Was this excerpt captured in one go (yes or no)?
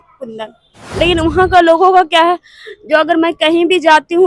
no